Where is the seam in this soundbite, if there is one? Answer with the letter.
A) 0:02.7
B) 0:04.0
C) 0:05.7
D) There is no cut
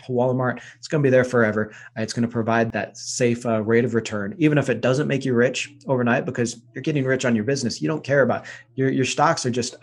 A